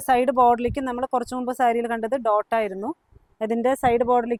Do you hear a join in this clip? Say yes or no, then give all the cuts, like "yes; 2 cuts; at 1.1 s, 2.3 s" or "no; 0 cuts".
no; 0 cuts